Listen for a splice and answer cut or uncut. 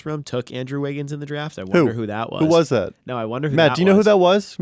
uncut